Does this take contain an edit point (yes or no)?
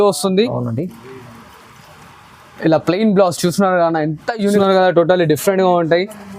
yes